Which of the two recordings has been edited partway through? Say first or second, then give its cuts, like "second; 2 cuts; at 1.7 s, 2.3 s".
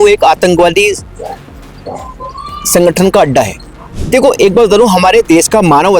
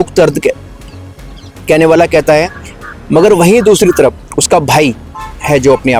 first; 1 cut; at 3.9 s